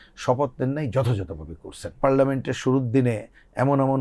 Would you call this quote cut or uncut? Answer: cut